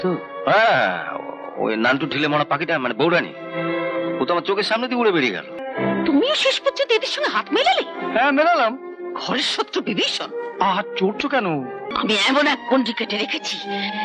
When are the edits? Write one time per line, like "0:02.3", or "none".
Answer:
0:05.6
0:11.9